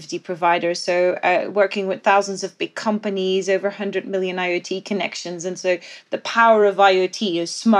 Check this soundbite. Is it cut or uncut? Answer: uncut